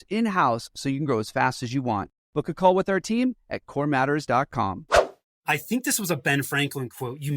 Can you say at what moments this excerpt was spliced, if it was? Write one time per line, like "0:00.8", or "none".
0:05.2